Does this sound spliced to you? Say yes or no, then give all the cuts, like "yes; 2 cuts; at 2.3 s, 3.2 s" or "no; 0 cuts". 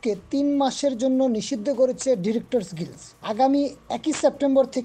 no; 0 cuts